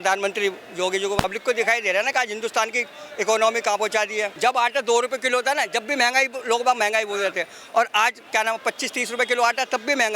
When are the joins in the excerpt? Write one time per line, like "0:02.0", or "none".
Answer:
0:01.2
0:04.3